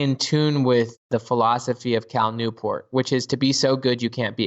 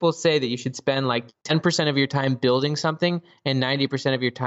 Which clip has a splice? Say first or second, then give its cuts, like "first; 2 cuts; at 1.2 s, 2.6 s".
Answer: first; 1 cut; at 1.1 s